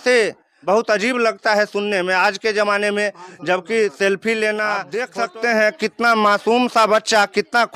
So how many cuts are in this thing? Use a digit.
1